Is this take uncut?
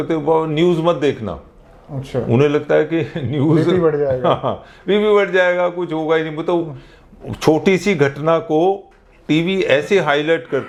yes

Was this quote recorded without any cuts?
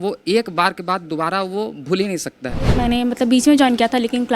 no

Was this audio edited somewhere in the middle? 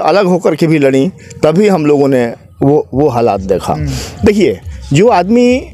no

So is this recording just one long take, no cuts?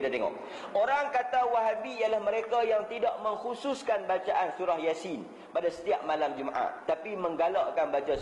yes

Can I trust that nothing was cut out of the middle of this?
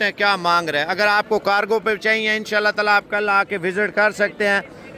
yes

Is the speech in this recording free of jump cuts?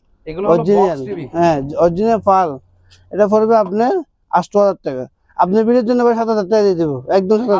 yes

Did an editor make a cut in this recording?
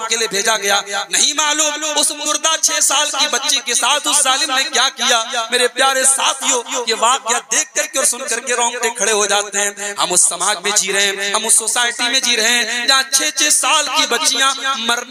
no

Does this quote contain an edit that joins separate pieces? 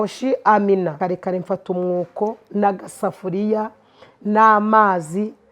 yes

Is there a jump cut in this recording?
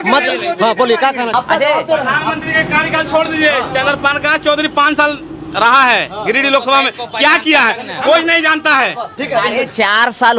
yes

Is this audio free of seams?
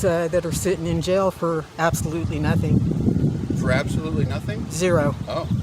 yes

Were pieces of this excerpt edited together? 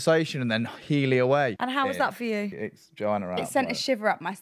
yes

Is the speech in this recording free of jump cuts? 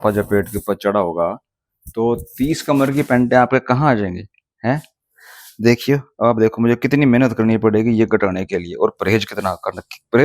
yes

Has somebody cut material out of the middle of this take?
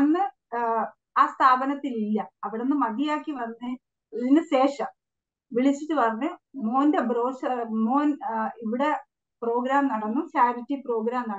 no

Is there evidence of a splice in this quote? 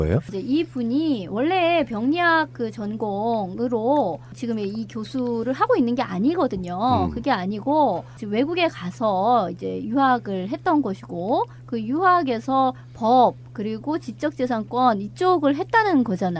yes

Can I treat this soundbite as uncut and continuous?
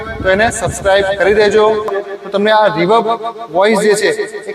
no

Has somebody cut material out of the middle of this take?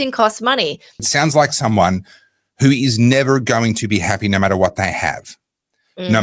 yes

